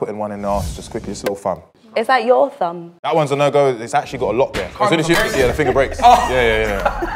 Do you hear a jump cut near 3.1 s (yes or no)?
yes